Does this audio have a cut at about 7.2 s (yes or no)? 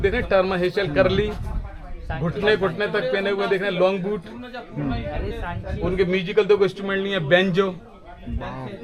no